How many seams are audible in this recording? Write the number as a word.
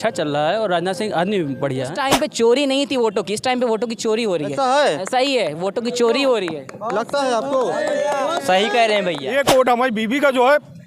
two